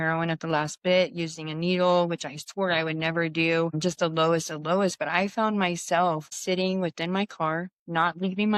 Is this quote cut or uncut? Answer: uncut